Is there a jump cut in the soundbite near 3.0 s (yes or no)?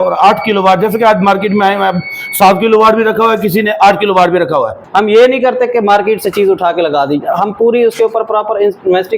no